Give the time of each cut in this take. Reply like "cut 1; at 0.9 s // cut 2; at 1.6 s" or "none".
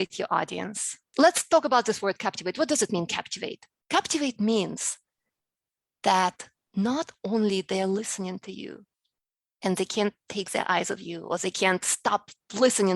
cut 1; at 1.1 s